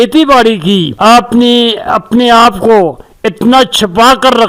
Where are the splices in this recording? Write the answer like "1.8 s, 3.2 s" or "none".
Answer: 0.9 s